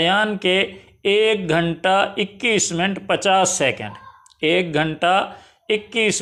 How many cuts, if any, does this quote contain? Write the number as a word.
zero